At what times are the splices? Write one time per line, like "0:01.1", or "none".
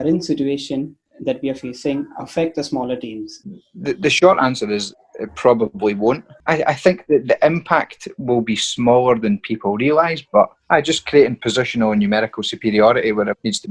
0:03.4
0:06.4
0:10.5